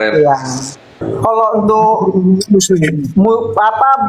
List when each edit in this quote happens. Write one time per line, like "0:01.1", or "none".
0:00.9